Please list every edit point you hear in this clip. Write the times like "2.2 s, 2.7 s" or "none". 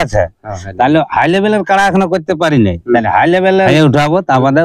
3.7 s